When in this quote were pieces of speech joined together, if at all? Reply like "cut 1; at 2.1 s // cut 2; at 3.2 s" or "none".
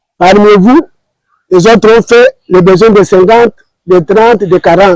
none